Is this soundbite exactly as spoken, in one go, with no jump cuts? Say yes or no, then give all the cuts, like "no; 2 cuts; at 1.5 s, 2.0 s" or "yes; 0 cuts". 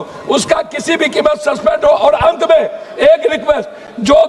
yes; 0 cuts